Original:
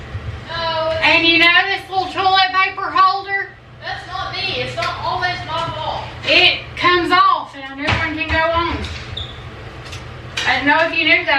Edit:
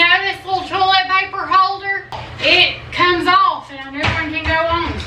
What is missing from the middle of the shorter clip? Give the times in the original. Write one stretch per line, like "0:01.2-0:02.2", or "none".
0:03.7-0:06.1